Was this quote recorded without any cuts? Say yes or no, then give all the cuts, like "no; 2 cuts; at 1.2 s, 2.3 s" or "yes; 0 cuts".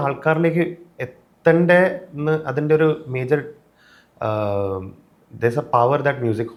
yes; 0 cuts